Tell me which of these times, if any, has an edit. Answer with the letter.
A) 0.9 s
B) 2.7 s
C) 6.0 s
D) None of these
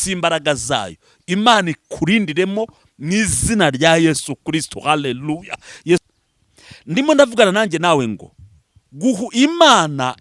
C